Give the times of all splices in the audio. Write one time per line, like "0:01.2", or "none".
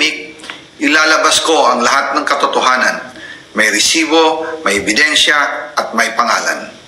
none

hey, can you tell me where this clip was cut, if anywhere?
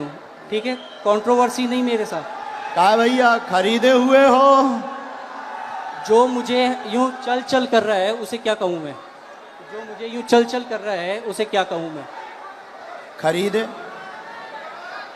none

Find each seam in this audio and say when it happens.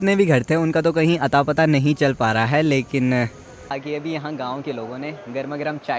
0:03.8

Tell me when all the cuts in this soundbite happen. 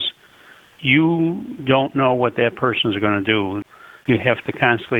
0:03.6

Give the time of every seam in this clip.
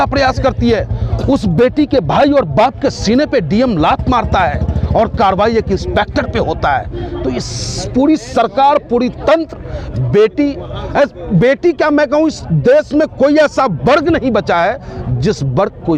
none

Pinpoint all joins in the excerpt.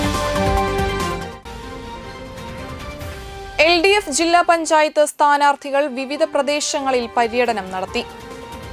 none

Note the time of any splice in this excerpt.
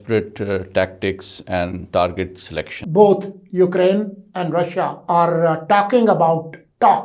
0:02.8
0:05.0

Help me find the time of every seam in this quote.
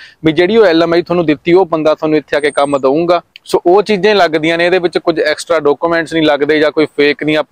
0:03.3

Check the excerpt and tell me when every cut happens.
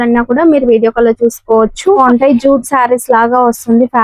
0:02.0

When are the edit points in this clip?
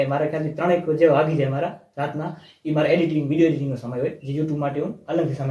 none

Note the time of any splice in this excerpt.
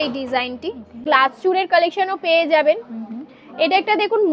0:01.0

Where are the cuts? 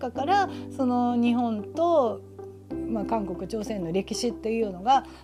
none

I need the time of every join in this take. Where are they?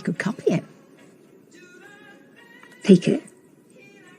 0:02.4

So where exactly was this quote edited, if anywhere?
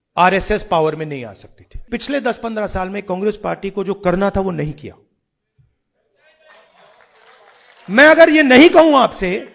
0:01.9

